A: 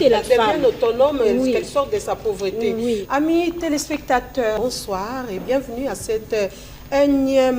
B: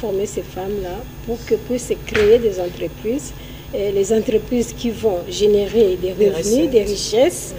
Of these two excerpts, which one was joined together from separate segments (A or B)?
A